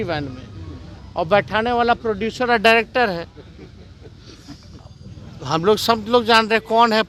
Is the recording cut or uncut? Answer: uncut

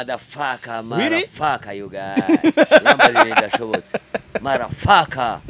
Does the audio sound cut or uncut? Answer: uncut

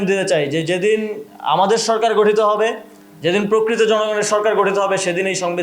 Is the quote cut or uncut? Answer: uncut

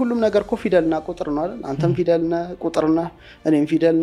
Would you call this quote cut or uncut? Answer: uncut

